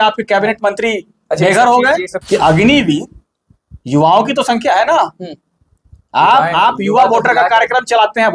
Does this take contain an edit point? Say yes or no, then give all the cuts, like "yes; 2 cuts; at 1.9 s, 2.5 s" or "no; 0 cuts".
yes; 1 cut; at 2.1 s